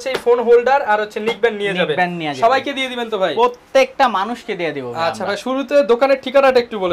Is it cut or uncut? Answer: uncut